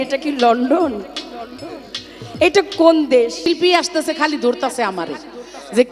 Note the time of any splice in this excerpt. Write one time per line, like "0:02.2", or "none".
0:03.4